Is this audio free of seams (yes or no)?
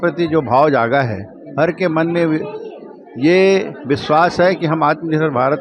yes